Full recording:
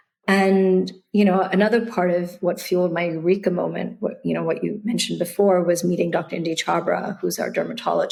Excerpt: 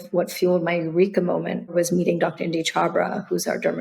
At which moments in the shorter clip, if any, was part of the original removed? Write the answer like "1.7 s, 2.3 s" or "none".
1.7 s